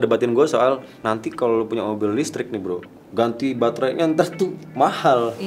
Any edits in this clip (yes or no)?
no